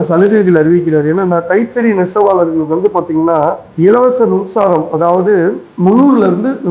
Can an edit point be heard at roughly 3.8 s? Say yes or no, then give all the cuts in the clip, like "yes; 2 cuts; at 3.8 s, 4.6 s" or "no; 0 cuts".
no; 0 cuts